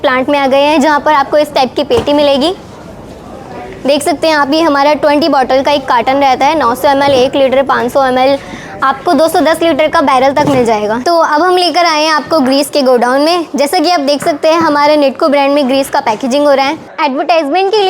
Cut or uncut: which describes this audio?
cut